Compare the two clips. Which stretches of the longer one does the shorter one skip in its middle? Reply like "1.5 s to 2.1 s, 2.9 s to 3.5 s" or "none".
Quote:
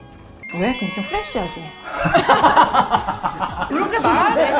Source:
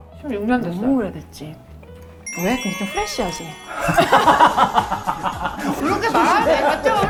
5.5 s to 5.8 s